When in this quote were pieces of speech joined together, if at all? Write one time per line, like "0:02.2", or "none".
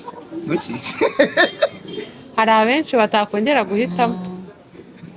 none

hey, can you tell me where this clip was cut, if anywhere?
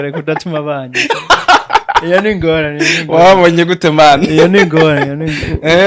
none

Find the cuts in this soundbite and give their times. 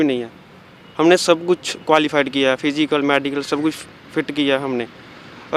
none

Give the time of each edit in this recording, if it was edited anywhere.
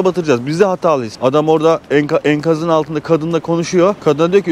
0:01.1

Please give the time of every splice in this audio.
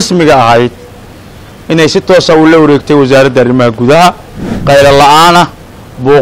0:04.5

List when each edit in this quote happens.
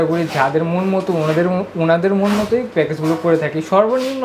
none

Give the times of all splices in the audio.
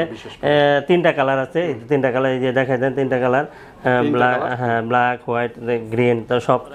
none

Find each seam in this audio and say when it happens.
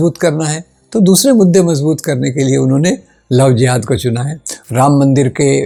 none

